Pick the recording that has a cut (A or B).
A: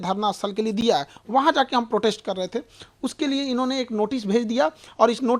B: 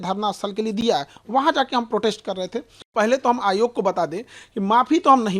B